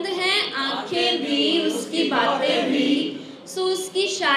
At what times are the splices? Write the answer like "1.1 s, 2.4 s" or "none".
none